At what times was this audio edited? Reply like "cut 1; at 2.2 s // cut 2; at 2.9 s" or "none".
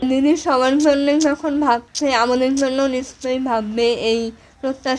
none